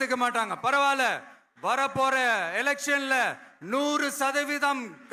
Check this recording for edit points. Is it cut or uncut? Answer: uncut